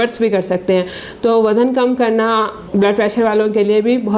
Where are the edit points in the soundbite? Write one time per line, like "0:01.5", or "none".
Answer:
none